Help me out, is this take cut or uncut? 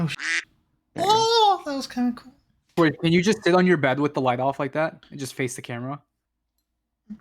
cut